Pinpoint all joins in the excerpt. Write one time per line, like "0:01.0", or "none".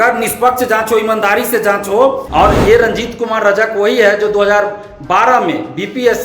0:02.2

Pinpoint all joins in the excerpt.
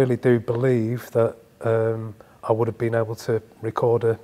none

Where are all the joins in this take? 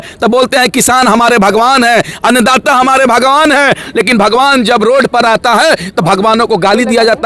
none

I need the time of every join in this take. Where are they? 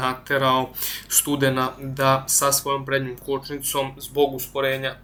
none

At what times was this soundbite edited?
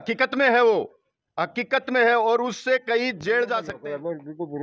0:03.7

